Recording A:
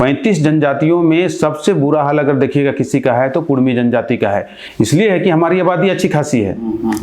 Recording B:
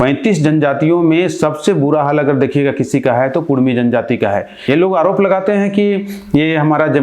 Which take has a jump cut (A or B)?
B